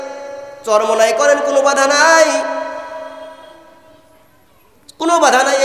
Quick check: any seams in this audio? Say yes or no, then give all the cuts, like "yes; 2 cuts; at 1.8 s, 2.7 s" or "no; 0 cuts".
no; 0 cuts